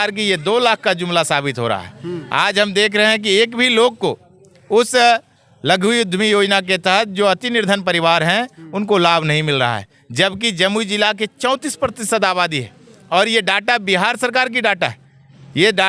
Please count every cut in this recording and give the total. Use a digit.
0